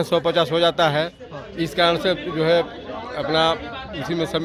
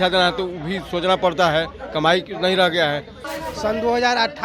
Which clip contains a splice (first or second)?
second